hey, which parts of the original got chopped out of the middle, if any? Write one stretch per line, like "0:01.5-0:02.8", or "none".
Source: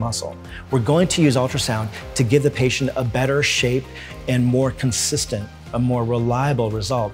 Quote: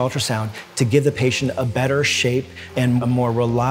0:04.2-0:05.5

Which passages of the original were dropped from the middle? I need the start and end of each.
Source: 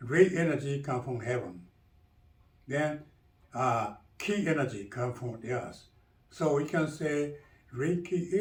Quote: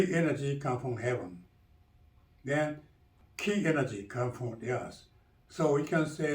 0:03.4-0:04.0

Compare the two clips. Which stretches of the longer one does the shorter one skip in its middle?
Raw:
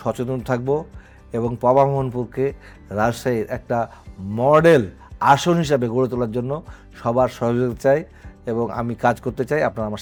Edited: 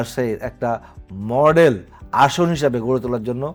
none

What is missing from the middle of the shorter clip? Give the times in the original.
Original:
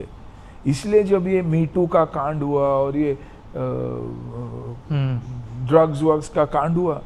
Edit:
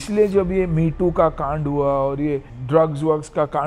0:03.3-0:05.5

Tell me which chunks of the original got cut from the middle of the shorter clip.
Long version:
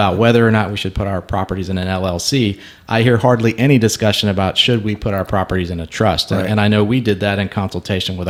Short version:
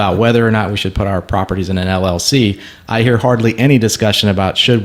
none

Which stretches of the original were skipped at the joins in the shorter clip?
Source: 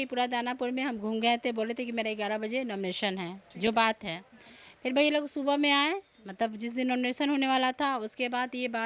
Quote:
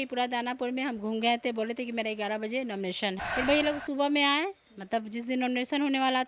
0:03.2-0:04.7

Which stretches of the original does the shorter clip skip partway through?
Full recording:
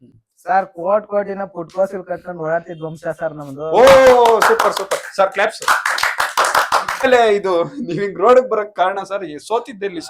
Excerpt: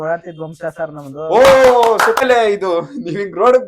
0:04.6-0:07.0

